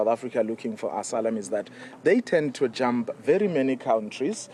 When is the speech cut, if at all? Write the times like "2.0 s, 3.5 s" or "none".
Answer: none